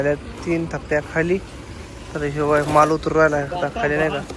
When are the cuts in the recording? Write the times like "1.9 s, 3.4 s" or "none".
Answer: none

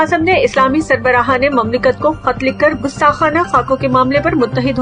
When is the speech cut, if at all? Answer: none

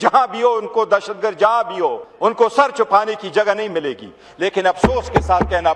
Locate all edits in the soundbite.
2.1 s

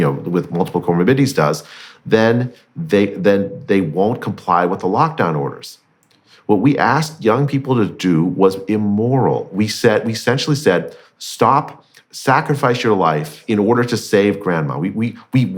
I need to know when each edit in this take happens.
13.3 s

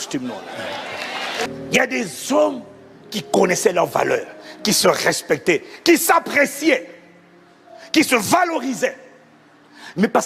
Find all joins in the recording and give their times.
1.5 s

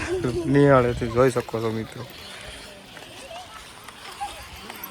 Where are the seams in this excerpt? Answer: none

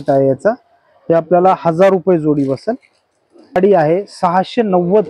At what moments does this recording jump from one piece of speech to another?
3.5 s

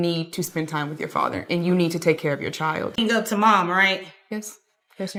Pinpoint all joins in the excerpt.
none

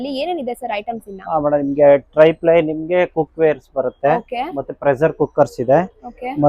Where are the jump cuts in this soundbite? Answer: none

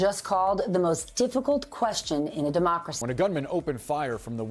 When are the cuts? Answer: 2.9 s

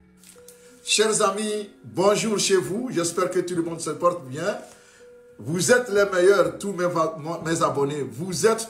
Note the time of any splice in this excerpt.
1.0 s

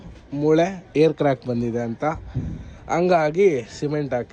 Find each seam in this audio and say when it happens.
none

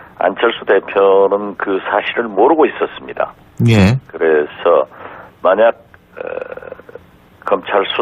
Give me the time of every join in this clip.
7.1 s

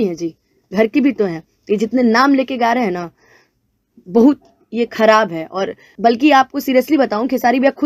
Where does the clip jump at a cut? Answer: 5.9 s

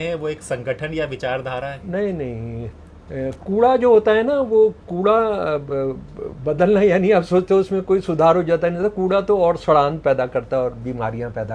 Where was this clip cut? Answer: none

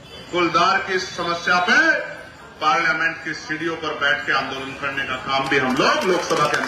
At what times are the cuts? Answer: none

